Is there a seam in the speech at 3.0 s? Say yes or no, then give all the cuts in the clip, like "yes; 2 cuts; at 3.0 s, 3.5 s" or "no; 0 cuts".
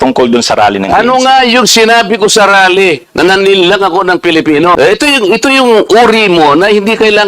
no; 1 cut; at 4.8 s